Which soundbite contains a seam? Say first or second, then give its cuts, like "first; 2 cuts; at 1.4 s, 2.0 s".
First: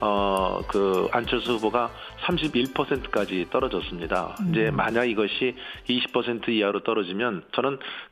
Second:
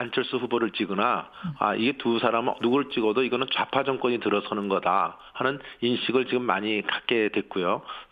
first; 1 cut; at 5.2 s